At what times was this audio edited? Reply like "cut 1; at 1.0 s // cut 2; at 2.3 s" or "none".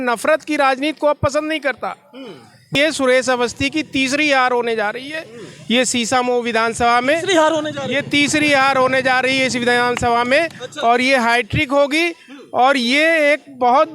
cut 1; at 2.7 s